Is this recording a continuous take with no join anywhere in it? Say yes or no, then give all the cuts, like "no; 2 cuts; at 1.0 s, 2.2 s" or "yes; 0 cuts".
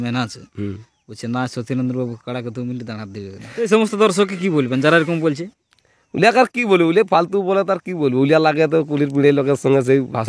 no; 1 cut; at 3.7 s